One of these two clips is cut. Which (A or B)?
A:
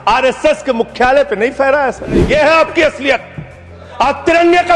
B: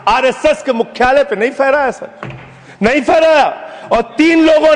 A